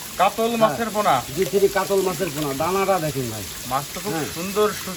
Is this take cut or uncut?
uncut